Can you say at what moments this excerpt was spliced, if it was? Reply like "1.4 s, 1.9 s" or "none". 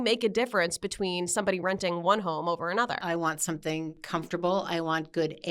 3.0 s, 4.0 s